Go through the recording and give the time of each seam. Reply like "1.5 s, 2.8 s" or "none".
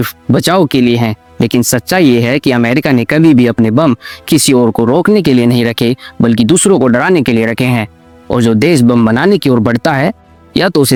none